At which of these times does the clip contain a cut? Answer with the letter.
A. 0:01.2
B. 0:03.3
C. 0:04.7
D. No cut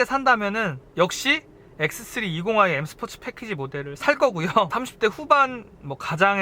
C